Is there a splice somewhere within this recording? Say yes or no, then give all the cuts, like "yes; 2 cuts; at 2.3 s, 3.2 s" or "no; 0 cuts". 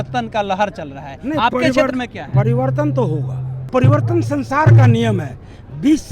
yes; 1 cut; at 3.7 s